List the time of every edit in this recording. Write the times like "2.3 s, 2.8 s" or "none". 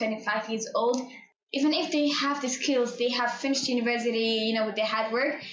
1.2 s